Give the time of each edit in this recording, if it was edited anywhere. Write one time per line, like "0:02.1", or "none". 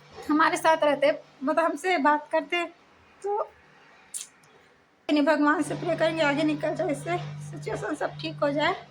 0:05.1